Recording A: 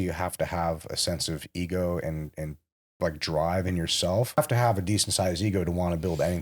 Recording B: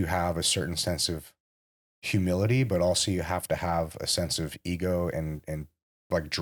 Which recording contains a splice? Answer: A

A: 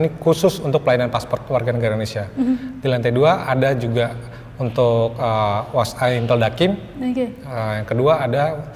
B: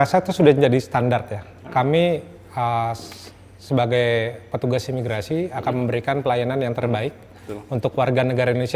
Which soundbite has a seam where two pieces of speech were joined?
B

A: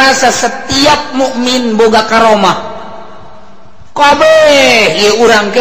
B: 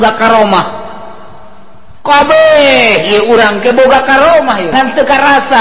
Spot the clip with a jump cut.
B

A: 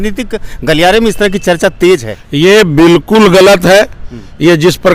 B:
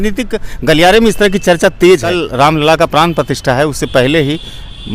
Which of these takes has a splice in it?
B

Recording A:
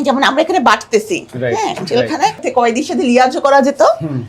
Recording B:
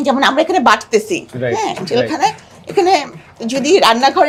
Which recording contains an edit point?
A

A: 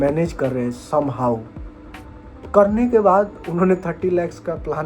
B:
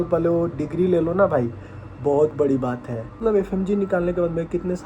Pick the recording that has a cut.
B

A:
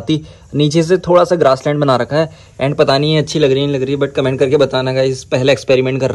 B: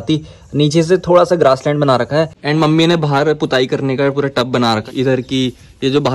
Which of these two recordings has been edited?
B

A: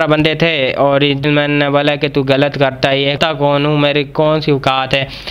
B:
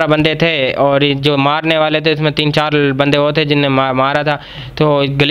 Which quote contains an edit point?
A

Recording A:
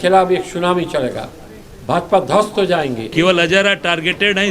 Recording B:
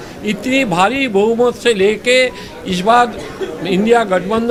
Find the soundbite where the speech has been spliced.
A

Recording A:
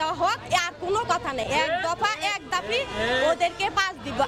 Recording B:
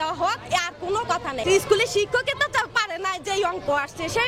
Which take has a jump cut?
B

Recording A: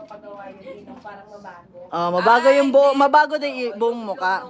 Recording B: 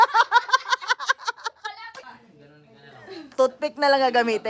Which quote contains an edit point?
B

